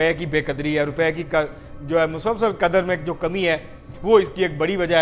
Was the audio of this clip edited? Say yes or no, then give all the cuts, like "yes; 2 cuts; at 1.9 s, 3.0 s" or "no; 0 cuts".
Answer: no; 0 cuts